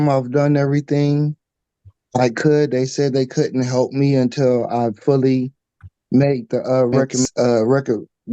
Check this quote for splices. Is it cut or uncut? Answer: cut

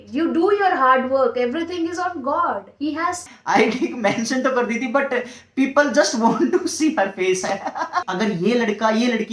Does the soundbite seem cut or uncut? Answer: cut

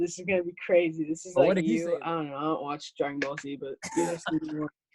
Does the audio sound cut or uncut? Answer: cut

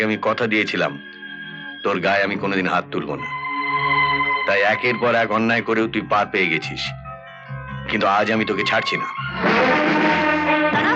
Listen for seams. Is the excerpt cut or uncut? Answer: uncut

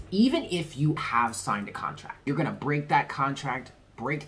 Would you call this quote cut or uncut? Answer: cut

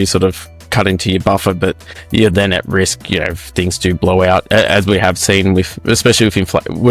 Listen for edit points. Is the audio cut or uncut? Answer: uncut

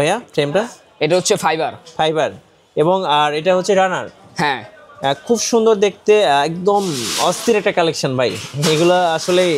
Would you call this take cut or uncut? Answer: uncut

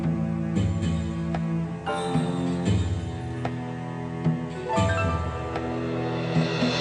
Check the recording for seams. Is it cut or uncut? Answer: uncut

